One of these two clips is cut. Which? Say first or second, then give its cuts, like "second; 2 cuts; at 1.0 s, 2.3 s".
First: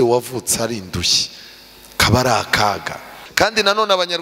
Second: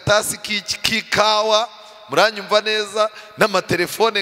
first; 1 cut; at 3.2 s